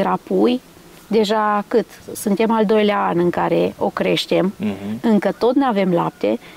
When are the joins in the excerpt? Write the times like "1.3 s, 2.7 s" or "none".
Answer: none